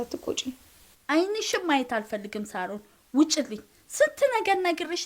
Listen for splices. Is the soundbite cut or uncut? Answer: uncut